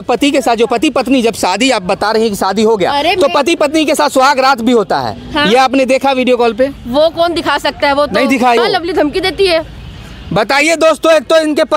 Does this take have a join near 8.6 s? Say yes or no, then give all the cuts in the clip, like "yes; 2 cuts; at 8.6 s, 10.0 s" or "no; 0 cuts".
yes; 1 cut; at 8.6 s